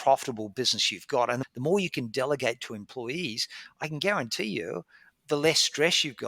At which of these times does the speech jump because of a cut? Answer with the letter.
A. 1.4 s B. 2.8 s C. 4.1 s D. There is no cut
A